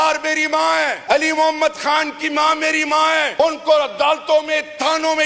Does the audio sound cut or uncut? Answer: cut